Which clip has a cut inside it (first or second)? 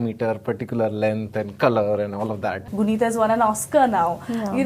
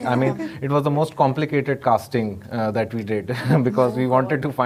first